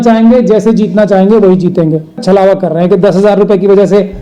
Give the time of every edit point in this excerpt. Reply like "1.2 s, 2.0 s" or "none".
2.2 s